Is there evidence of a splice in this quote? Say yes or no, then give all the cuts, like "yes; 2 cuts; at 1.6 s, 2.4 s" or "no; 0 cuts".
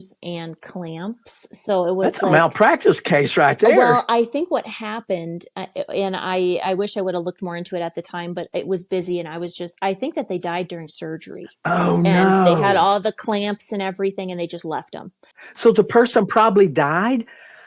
yes; 1 cut; at 15.6 s